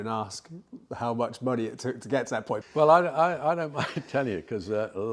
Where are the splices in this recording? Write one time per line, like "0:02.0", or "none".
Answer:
0:02.6